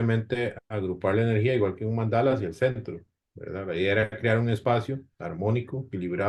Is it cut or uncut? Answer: uncut